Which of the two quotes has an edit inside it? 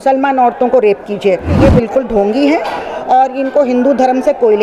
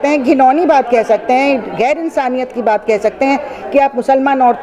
first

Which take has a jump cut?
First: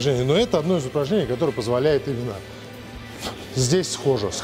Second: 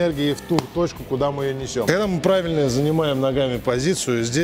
second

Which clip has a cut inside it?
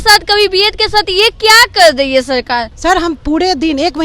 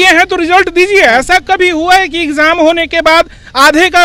first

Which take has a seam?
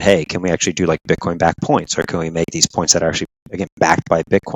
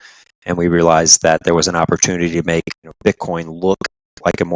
second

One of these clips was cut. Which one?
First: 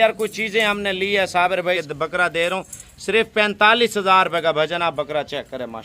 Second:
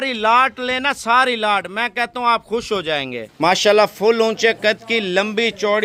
first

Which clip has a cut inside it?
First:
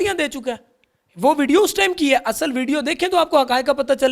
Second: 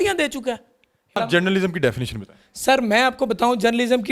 second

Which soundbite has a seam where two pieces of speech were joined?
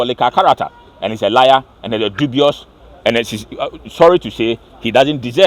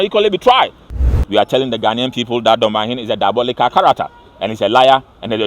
second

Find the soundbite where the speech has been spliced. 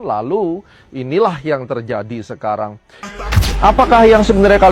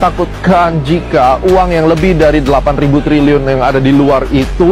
first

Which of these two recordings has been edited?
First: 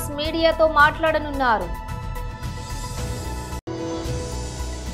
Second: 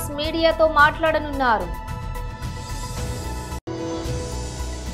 second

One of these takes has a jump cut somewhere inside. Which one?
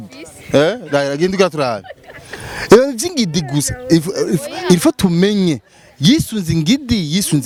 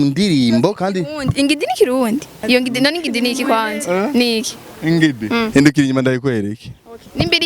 second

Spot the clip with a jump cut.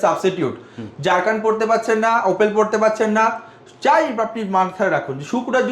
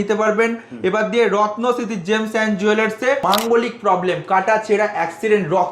second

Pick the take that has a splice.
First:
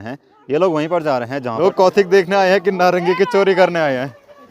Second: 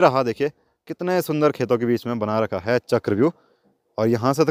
first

